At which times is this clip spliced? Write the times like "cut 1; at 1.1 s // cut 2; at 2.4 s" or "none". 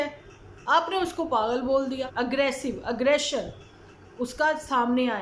cut 1; at 2.1 s